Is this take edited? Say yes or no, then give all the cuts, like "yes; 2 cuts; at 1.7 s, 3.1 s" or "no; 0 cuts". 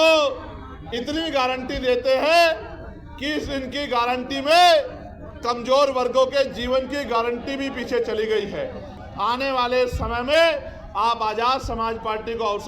yes; 1 cut; at 9.0 s